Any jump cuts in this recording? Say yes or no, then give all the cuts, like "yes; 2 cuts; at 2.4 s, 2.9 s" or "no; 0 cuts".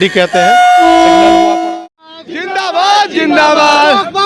yes; 1 cut; at 1.6 s